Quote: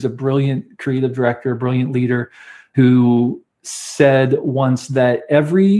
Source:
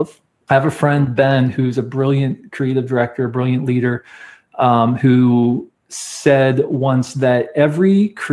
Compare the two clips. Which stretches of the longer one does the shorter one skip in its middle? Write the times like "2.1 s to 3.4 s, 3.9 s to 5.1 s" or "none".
4.4 s to 5.0 s